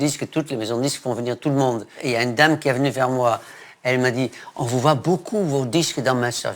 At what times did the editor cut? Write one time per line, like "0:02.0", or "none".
0:02.0
0:03.6

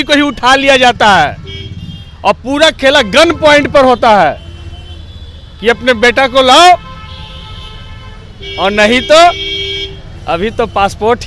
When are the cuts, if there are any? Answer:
none

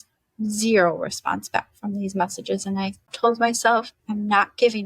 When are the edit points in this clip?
0:03.1
0:04.0

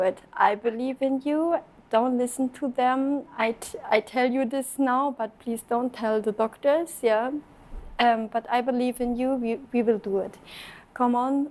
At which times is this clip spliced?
none

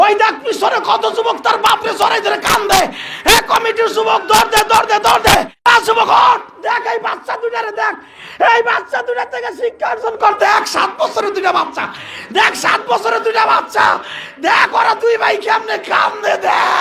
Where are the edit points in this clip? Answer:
0:05.5

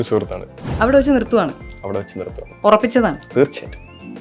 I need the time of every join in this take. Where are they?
0:02.4

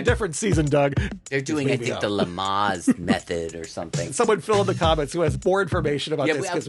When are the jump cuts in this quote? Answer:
0:01.0
0:04.1
0:05.4

